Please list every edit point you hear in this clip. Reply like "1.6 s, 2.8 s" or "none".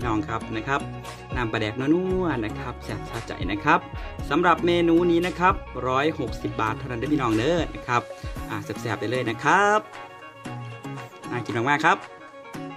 9.8 s, 11.3 s, 12.0 s